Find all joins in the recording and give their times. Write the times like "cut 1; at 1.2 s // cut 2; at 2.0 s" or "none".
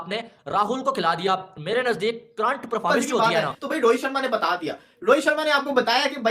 cut 1; at 3.2 s